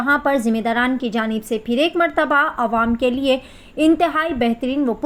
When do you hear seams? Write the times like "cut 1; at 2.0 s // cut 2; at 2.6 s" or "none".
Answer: none